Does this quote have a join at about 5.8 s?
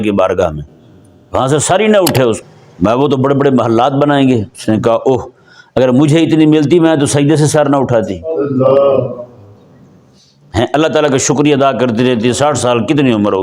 no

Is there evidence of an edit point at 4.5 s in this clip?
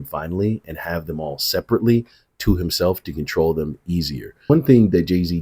yes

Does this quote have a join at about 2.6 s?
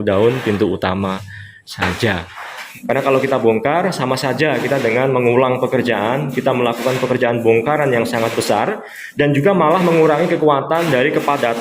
yes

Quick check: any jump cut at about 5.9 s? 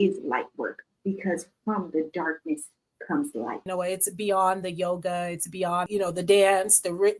yes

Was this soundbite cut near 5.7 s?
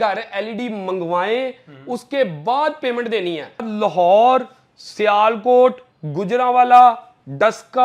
no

